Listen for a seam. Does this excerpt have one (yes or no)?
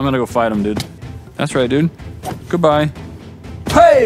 yes